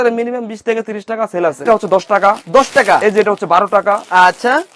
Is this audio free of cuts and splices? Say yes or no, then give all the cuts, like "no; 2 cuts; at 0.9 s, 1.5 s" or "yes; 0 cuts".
no; 1 cut; at 1.6 s